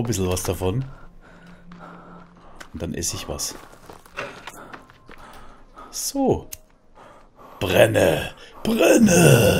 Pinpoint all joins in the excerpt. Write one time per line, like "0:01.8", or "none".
none